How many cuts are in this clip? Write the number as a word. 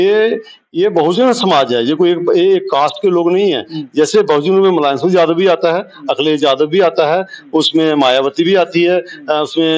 zero